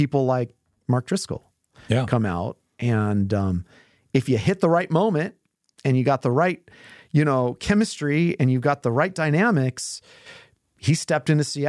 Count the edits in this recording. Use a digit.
0